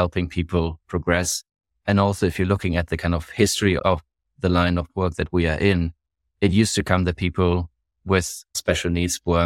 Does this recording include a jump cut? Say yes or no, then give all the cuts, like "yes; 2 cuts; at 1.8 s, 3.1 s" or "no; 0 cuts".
yes; 2 cuts; at 3.8 s, 8.6 s